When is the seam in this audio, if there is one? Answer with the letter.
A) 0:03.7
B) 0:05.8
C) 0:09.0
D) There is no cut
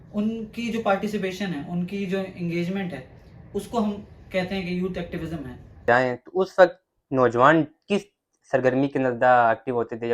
B